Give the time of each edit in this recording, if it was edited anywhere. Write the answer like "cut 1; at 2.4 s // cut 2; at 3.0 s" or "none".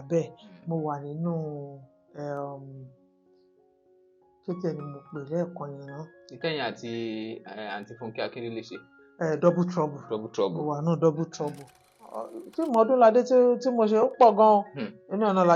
cut 1; at 12.2 s